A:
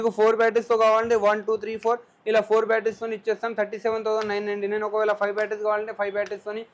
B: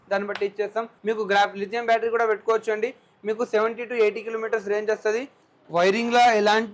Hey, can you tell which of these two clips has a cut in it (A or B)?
B